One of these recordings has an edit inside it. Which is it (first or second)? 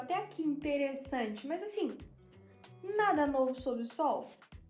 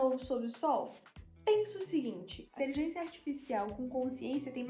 second